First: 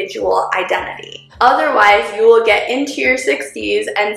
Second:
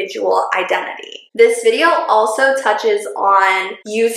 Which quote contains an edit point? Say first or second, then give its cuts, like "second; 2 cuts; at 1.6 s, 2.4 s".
first; 1 cut; at 1.3 s